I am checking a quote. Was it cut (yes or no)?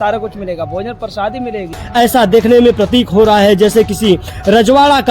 yes